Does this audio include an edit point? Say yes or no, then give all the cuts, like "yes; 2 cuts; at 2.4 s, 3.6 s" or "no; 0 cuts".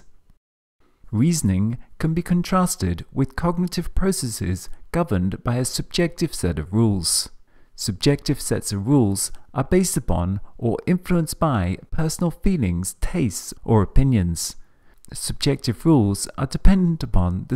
no; 0 cuts